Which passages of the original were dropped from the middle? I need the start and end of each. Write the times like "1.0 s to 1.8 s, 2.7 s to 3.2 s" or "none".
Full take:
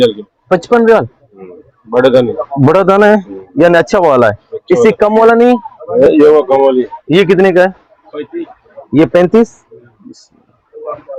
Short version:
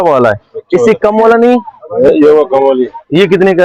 none